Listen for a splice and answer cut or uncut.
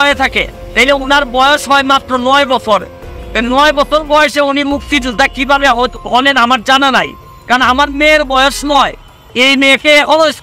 uncut